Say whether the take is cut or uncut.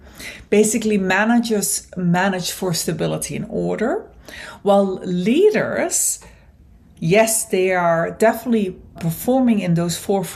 cut